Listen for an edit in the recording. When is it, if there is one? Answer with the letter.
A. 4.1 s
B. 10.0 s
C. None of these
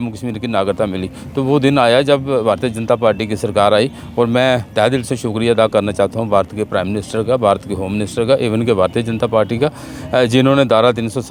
C